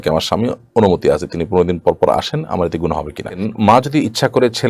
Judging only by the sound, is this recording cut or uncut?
cut